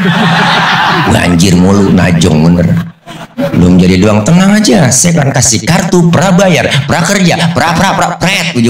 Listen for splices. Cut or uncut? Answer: uncut